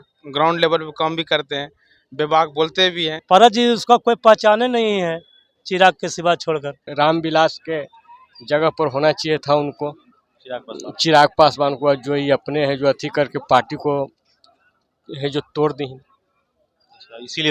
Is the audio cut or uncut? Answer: cut